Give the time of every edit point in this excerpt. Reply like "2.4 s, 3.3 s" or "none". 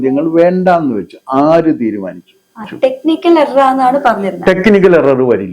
2.7 s